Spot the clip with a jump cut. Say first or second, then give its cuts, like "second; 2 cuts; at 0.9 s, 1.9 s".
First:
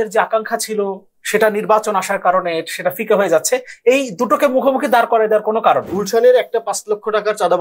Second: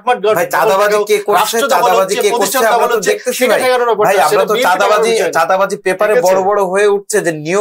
first; 1 cut; at 5.9 s